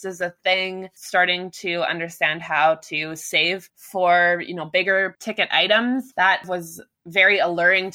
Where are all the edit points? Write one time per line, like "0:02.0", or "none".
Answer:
0:03.7
0:05.2
0:06.5

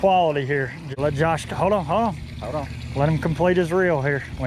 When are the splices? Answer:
0:00.9

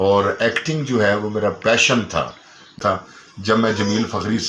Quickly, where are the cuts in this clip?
0:02.8

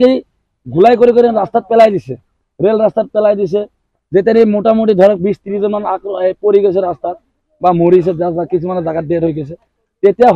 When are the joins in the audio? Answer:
none

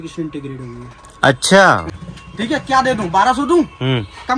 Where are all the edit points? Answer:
0:02.0

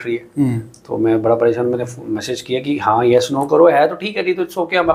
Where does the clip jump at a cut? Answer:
none

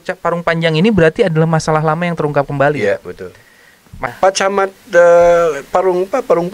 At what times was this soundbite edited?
0:04.1

